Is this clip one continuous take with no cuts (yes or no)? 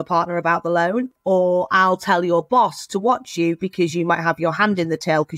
no